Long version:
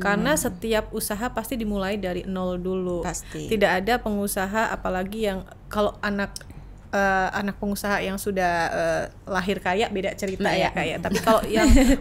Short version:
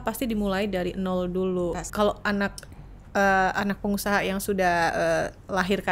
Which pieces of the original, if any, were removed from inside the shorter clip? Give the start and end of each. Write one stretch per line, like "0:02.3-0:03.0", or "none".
0:03.1-0:05.6